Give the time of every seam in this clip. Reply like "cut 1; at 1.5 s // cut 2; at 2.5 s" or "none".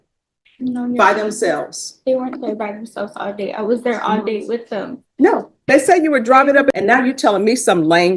cut 1; at 6.8 s